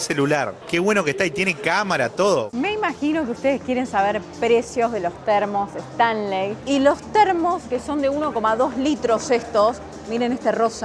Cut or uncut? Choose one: cut